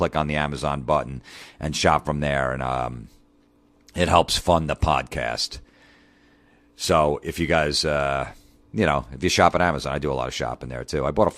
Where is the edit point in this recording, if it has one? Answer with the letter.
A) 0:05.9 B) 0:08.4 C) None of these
B